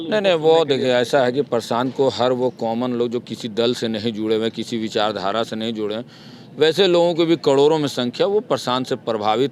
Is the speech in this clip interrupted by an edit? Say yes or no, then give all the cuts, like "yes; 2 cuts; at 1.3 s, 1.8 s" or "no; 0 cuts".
no; 0 cuts